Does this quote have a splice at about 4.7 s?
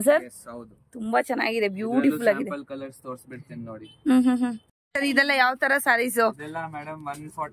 yes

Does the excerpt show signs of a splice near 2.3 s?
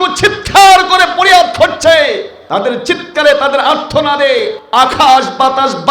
yes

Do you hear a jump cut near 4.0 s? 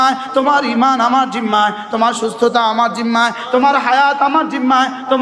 no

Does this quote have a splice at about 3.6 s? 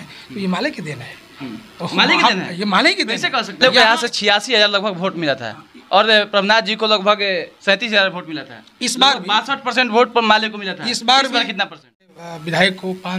yes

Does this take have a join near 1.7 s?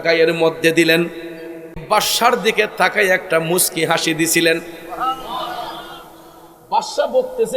yes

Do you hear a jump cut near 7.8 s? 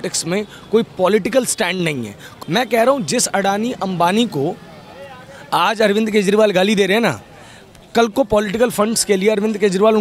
no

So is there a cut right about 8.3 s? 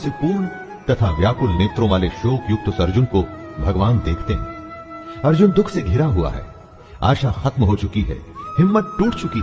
no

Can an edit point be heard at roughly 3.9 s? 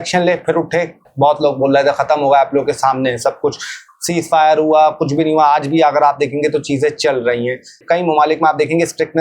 no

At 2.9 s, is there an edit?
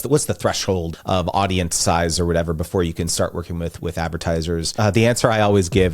no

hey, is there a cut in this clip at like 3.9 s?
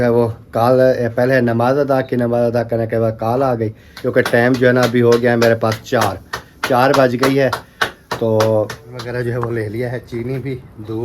yes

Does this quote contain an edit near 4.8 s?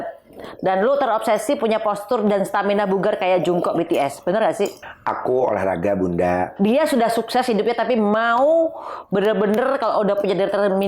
yes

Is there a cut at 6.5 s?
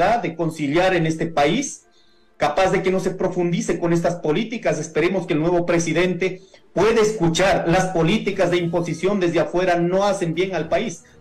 no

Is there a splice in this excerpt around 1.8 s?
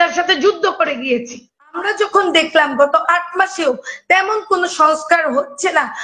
yes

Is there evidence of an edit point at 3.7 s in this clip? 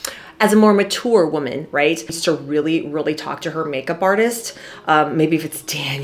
no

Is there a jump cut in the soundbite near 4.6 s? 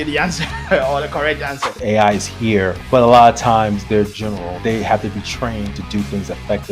yes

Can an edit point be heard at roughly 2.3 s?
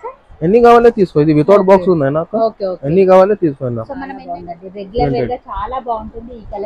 no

